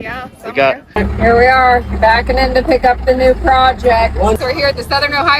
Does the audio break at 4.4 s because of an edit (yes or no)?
yes